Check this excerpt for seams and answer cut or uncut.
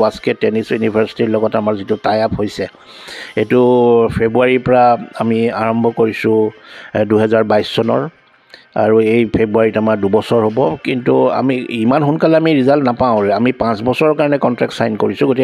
uncut